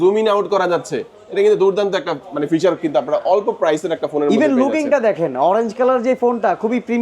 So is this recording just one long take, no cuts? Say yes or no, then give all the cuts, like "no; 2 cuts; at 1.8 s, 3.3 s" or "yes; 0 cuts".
yes; 0 cuts